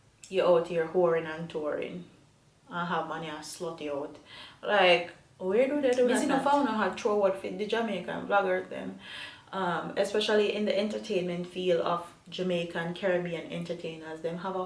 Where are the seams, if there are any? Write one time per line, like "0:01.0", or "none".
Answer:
0:06.1

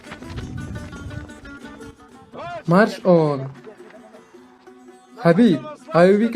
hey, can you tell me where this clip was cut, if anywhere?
none

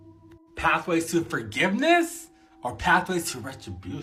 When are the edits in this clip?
none

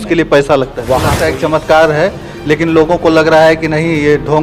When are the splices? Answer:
0:01.1

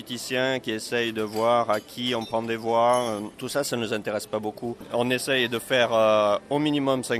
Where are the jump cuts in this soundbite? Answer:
0:03.4
0:04.8

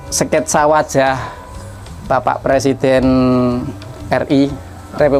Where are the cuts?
none

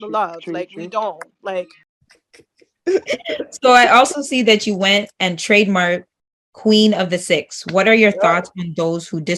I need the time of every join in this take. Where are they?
0:01.8
0:07.5

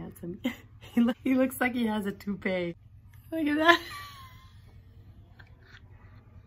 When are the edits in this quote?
0:01.2
0:02.9

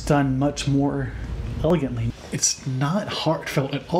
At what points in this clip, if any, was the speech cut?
0:01.7

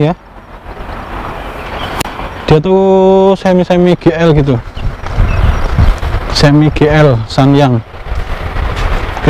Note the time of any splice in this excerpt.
none

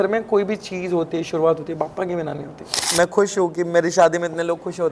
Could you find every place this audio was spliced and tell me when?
0:02.8

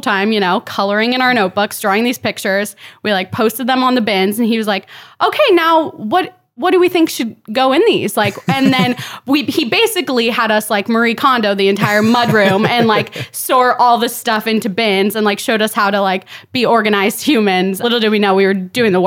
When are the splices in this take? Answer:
0:17.8

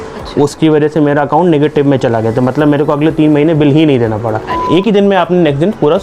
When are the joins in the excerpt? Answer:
0:04.6

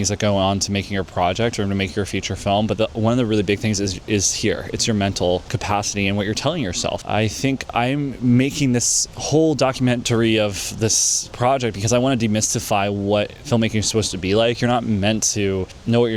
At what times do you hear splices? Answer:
none

